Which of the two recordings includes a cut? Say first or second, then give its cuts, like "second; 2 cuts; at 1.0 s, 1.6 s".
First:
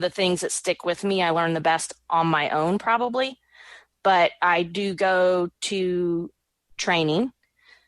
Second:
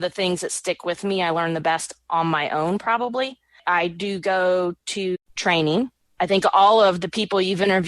second; 3 cuts; at 3.6 s, 5.2 s, 6.0 s